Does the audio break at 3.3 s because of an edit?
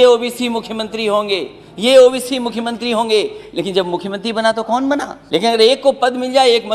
no; 1 cut; at 5.2 s

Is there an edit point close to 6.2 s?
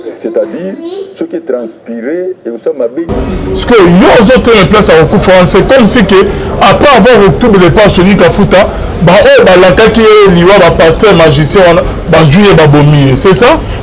no; 1 cut; at 3.2 s

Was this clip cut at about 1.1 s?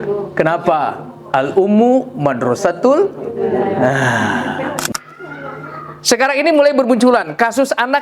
no; 1 cut; at 4.9 s

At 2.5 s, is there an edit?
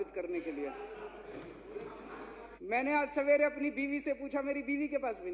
yes; 1 cut; at 2.5 s

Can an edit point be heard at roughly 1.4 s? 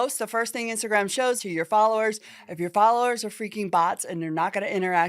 yes; 1 cut; at 1.4 s

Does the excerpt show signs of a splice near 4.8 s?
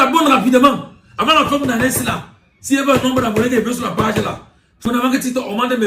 yes; 1 cut; at 4.8 s

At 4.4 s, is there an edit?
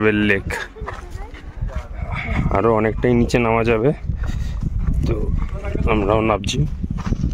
no; 0 cuts

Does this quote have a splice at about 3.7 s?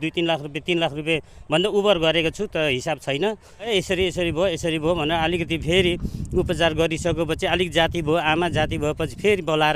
yes; 1 cut; at 3.7 s

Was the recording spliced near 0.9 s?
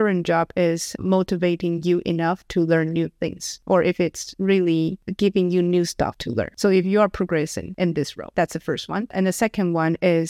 yes; 2 cuts; at 0.9 s, 8.3 s

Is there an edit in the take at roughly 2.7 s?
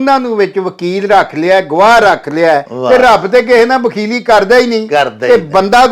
yes; 1 cut; at 2.7 s

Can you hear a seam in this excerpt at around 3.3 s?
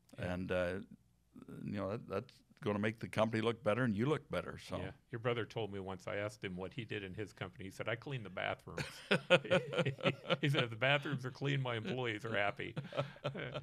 no; 0 cuts

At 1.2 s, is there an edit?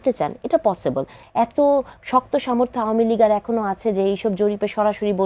yes; 1 cut; at 1.2 s

